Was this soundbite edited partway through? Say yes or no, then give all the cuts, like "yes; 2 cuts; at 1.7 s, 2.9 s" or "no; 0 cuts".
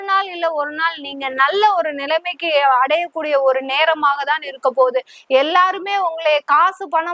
no; 0 cuts